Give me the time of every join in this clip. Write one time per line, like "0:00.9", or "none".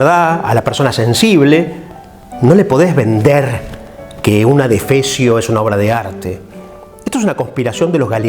0:06.9